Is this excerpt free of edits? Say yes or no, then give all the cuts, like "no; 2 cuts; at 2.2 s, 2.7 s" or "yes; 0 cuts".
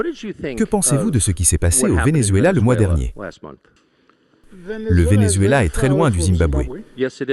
yes; 0 cuts